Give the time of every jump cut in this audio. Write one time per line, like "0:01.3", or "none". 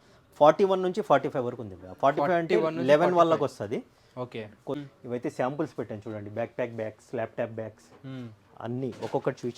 0:04.8